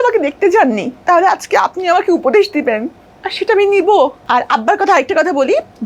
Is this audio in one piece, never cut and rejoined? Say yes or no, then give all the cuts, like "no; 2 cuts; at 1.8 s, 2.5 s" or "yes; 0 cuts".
no; 2 cuts; at 0.9 s, 4.2 s